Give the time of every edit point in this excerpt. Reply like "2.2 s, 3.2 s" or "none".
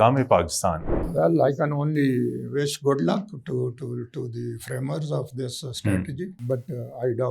1.1 s, 6.4 s